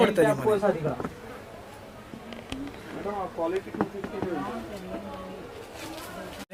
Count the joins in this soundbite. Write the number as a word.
zero